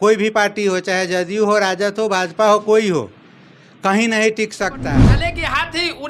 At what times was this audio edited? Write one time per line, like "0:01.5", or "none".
0:05.1